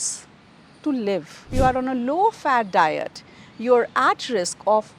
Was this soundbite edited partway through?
yes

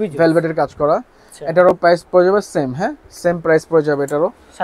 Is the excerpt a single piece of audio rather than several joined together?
yes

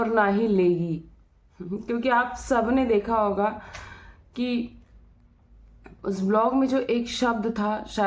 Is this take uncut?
yes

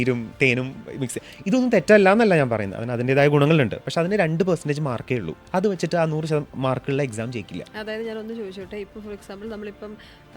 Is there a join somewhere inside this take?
no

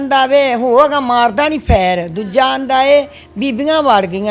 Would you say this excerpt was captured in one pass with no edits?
yes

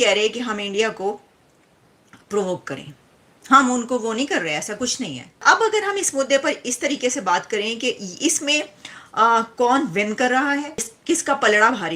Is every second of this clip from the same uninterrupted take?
no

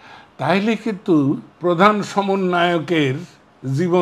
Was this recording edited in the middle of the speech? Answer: yes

